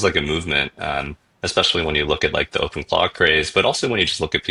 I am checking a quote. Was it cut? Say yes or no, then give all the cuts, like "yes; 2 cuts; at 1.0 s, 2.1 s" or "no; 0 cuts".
no; 0 cuts